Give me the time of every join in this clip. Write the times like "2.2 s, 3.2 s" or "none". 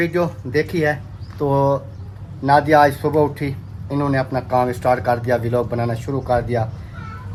none